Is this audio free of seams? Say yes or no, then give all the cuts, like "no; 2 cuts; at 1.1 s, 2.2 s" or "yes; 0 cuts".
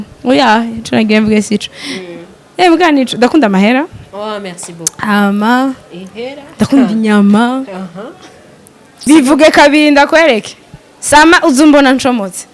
no; 1 cut; at 9.0 s